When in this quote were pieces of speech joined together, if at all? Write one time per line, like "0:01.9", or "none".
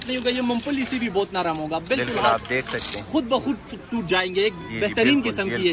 none